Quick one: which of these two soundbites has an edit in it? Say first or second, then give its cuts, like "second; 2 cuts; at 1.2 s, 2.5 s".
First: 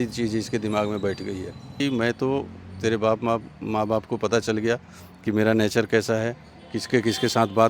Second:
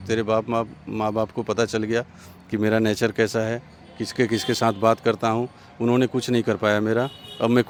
first; 1 cut; at 1.8 s